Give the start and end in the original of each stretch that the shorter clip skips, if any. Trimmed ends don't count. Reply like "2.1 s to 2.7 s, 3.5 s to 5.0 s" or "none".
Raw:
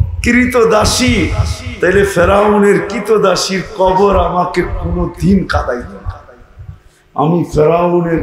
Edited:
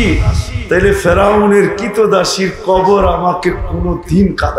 none